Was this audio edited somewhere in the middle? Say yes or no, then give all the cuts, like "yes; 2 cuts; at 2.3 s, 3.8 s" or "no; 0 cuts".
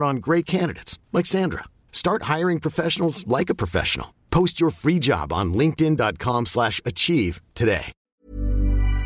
yes; 1 cut; at 8.0 s